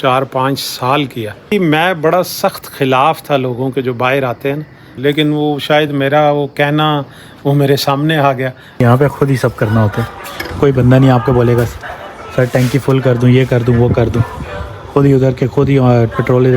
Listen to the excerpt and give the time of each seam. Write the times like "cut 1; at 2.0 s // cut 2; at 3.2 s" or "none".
cut 1; at 1.5 s // cut 2; at 4.9 s // cut 3; at 8.8 s